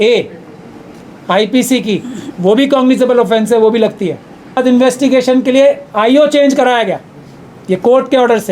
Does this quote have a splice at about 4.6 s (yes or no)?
yes